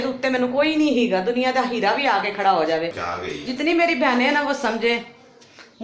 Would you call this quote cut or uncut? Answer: uncut